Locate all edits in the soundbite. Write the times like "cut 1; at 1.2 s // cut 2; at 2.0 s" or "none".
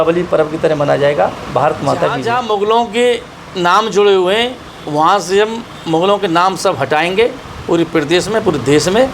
cut 1; at 2.2 s

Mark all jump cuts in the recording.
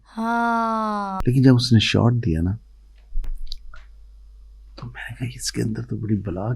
cut 1; at 1.2 s

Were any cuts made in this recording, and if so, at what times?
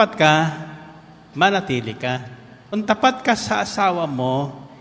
cut 1; at 2.7 s

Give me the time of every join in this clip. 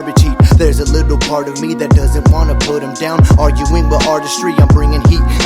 cut 1; at 3.5 s

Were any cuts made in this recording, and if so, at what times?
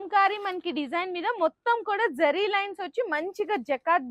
none

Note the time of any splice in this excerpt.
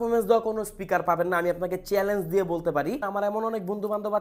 cut 1; at 3.0 s

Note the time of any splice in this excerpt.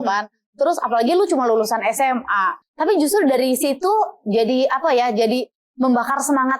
cut 1; at 2.6 s

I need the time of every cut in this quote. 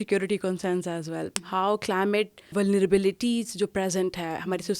cut 1; at 1.3 s // cut 2; at 2.5 s

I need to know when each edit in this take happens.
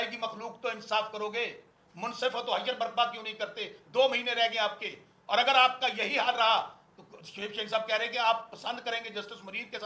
none

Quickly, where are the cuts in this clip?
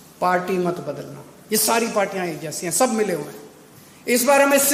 none

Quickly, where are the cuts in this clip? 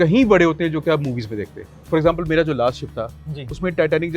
cut 1; at 1.8 s

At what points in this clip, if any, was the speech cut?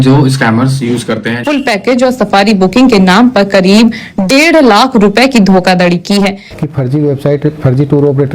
cut 1; at 1.4 s // cut 2; at 6.4 s

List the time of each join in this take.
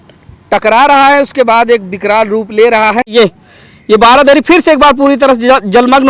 cut 1; at 3.1 s

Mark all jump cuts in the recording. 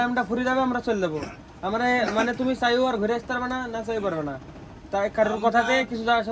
none

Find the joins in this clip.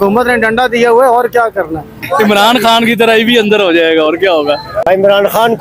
cut 1; at 2.0 s // cut 2; at 4.9 s

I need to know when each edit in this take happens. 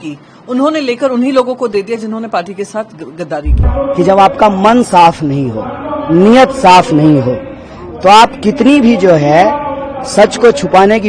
cut 1; at 3.6 s

